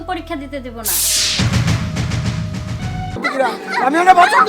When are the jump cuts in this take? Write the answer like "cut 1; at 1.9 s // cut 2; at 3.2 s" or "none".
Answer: cut 1; at 3.1 s